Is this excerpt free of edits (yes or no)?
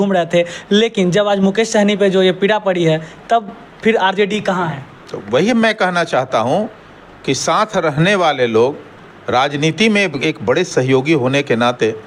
yes